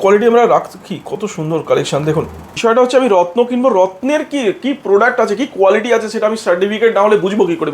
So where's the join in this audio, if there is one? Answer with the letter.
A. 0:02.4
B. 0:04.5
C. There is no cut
A